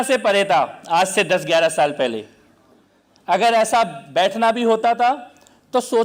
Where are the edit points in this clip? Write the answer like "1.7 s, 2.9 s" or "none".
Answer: none